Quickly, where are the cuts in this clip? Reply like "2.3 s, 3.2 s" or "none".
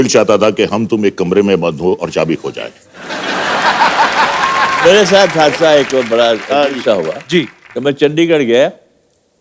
4.8 s, 7.6 s